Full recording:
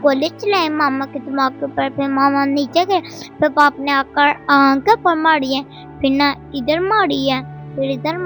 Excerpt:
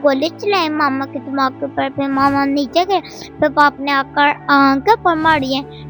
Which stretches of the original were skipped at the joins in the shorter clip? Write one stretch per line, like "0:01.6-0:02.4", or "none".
none